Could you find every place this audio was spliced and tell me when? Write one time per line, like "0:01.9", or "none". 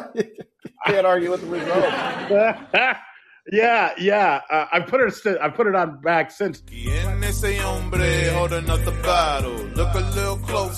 0:06.9